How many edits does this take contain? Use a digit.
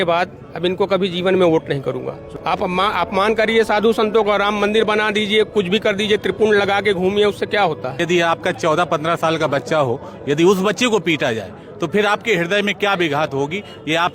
2